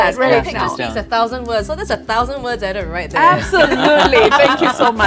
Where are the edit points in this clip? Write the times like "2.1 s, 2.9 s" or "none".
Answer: none